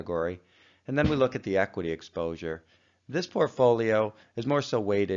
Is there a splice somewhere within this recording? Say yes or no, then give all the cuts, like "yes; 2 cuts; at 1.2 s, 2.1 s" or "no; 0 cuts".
yes; 1 cut; at 2.4 s